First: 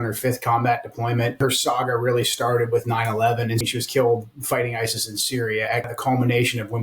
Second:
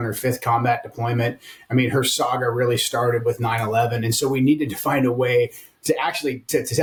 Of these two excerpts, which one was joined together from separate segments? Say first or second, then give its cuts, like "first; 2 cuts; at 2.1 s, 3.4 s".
first; 3 cuts; at 1.4 s, 3.6 s, 5.9 s